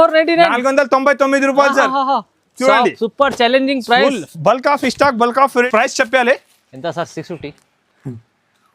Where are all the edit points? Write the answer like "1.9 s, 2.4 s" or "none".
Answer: 5.7 s